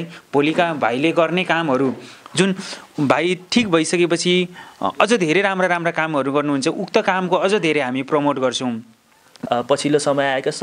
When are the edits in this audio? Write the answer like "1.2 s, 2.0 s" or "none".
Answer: 9.3 s

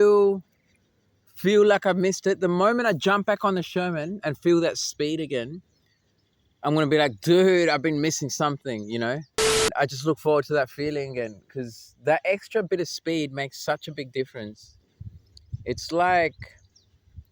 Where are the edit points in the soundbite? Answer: 9.7 s

